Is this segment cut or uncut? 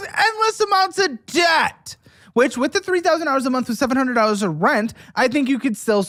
uncut